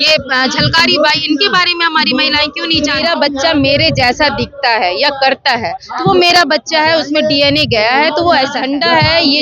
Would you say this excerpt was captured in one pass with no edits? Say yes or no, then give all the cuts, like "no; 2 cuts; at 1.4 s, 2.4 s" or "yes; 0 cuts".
no; 2 cuts; at 3.0 s, 8.6 s